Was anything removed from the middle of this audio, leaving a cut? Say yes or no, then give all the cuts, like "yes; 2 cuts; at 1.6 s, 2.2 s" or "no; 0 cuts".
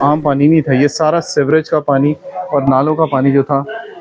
no; 0 cuts